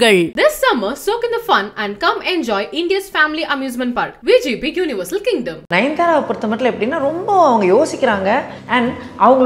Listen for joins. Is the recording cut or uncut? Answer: cut